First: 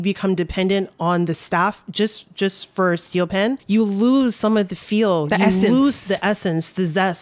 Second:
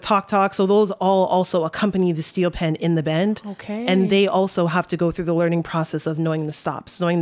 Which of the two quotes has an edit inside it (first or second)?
first